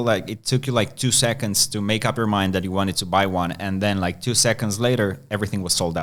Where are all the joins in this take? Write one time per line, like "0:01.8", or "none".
none